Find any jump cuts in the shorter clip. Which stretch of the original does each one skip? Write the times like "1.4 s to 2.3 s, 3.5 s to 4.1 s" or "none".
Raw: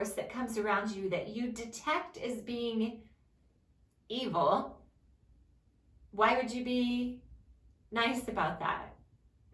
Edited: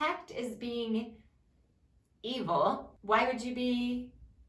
4.8 s to 6.0 s